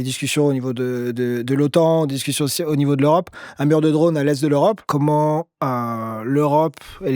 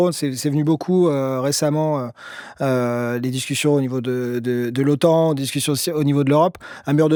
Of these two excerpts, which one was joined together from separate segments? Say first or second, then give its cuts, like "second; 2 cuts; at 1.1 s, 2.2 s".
first; 1 cut; at 4.8 s